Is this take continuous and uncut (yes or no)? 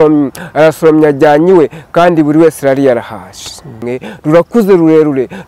no